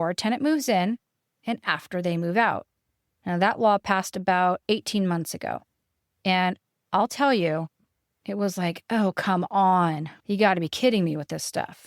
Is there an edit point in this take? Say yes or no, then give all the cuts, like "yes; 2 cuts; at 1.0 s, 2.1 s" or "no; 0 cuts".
yes; 1 cut; at 10.1 s